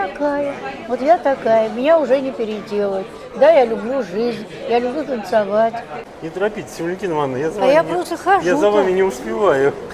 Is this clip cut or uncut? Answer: cut